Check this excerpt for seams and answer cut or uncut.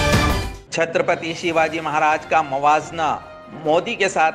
uncut